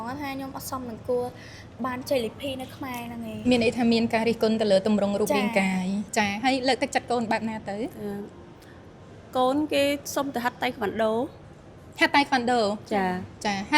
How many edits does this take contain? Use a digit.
1